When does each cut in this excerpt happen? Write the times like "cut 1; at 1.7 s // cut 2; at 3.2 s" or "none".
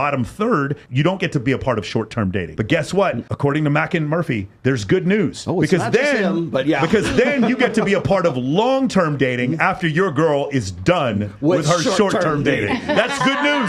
none